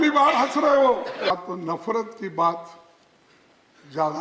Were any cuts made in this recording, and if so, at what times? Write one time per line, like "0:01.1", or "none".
0:01.3